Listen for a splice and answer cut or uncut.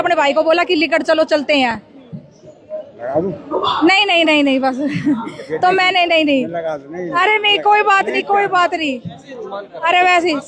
uncut